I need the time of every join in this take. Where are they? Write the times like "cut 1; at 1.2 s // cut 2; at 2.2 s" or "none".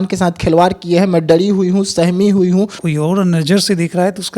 cut 1; at 2.8 s